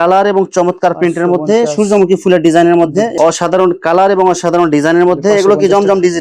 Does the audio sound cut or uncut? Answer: cut